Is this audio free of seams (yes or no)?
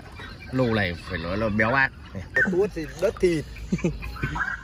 no